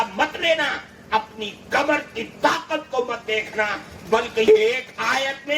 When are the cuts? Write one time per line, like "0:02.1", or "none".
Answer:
0:04.5